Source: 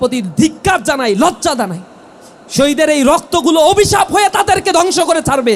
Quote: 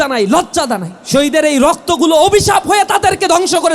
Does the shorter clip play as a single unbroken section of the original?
no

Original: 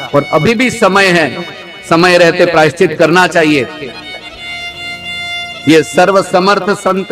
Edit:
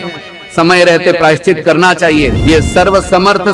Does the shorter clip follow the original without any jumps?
no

